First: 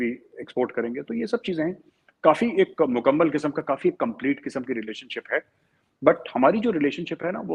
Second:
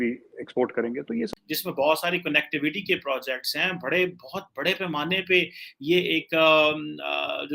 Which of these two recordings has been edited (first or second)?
second